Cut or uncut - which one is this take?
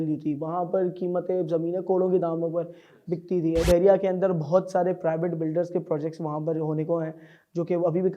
cut